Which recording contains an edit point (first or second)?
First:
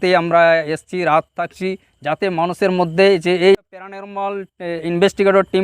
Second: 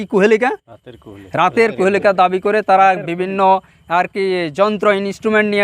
first